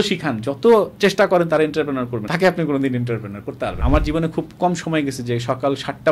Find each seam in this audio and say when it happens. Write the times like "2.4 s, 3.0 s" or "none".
2.2 s, 3.8 s